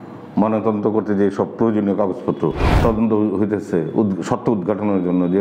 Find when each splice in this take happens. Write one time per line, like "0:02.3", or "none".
0:02.7

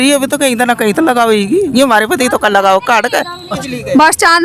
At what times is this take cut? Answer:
0:03.5

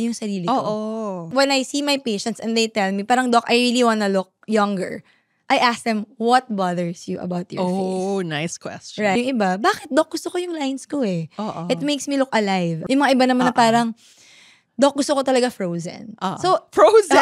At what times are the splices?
0:01.3
0:09.2
0:12.7

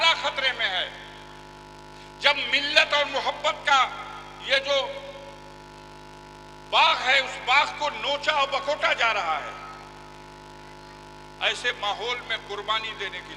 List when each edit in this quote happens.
none

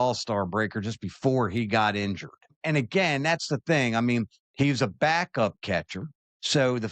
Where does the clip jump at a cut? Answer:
0:02.6

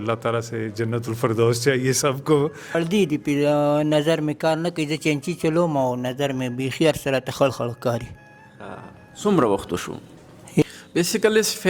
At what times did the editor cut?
0:02.8
0:10.6

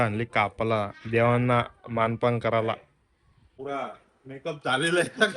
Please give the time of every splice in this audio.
0:03.5

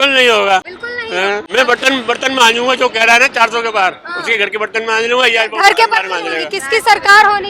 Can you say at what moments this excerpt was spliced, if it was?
0:01.3
0:06.5

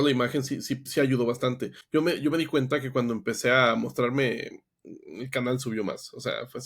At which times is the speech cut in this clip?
0:01.7

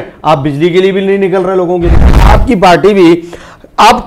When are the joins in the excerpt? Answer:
0:02.3

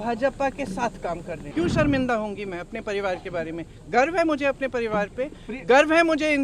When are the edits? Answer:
0:01.4

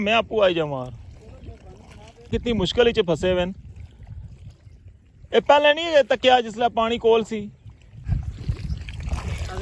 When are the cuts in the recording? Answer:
0:02.3
0:08.1

